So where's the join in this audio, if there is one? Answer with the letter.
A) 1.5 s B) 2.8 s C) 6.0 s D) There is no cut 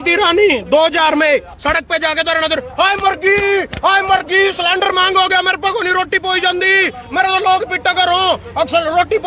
A